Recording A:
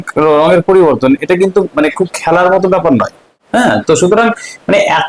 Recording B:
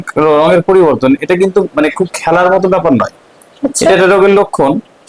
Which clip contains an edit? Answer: A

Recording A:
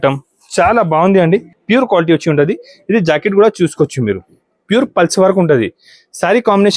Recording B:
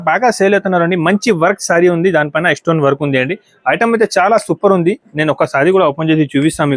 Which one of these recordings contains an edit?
A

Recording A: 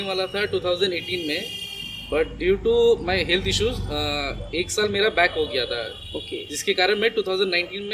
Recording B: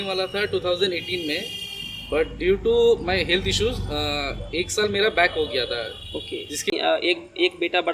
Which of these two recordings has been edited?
B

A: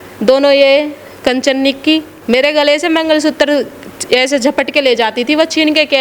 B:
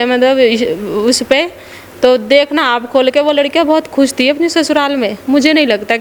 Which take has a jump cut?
A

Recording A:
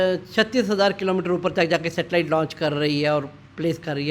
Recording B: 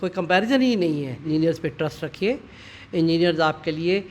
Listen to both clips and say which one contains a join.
B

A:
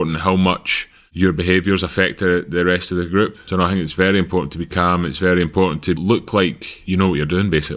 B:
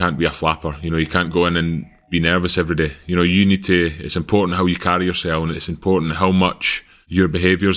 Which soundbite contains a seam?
A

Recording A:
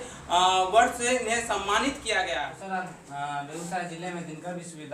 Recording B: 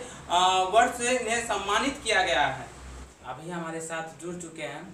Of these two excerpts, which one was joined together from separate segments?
A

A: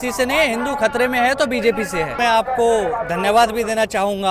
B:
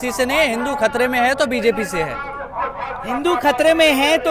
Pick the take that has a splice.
A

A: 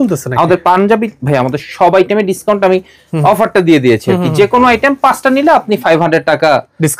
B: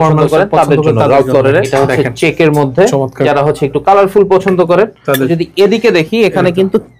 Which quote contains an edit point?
B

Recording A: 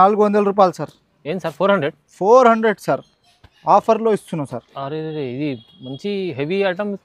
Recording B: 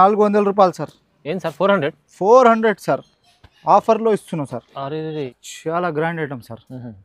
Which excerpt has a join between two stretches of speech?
B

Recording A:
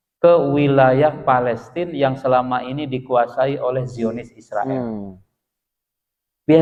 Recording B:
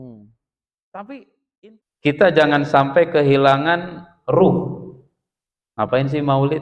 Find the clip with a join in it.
B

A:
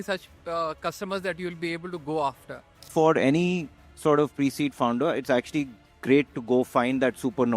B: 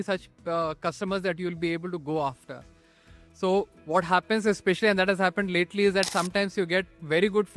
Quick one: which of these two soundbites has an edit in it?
A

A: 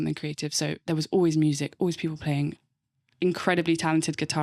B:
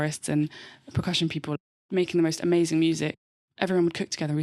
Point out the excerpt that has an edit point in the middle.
B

